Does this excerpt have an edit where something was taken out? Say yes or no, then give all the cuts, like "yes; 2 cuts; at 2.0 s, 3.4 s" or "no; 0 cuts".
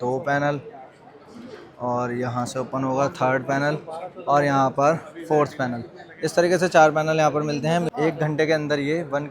yes; 1 cut; at 7.9 s